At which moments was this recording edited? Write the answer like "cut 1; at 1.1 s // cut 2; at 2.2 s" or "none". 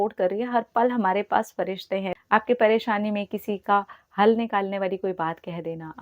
cut 1; at 2.1 s